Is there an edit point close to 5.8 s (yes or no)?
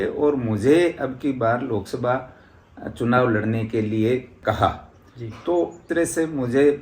yes